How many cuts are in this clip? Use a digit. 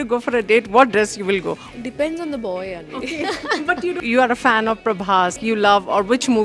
3